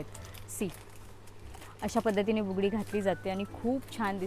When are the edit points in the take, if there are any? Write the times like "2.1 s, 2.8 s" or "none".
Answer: none